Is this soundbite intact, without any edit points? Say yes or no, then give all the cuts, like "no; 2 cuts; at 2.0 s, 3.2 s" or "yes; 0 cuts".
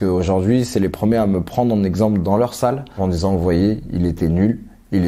no; 1 cut; at 3.0 s